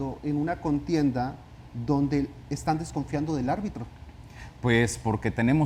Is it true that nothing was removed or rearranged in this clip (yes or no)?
yes